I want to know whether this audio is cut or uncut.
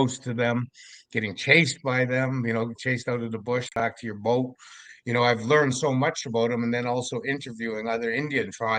uncut